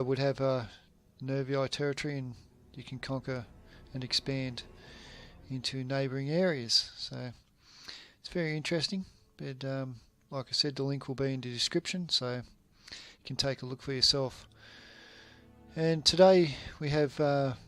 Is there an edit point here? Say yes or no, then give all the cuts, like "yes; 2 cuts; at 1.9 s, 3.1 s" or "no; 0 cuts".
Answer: no; 0 cuts